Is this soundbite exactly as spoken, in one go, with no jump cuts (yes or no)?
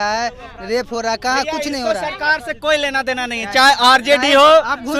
yes